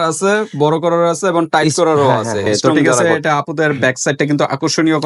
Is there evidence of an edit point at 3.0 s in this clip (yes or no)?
yes